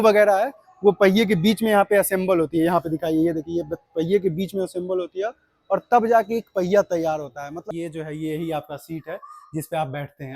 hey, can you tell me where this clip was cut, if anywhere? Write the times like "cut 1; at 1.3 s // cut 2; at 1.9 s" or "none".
cut 1; at 7.6 s

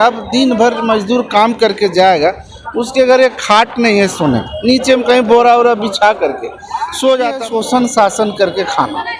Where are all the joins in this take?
cut 1; at 7.4 s

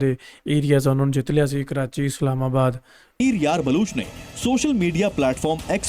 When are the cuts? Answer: cut 1; at 3.2 s

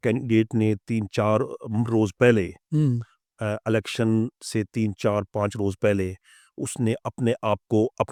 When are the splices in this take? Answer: none

